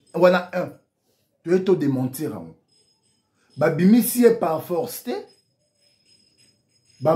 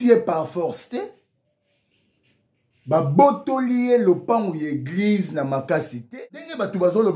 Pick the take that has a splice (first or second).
second